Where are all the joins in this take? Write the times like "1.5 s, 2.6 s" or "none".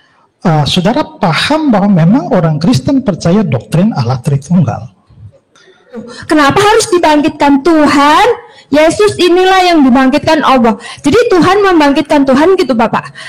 6.1 s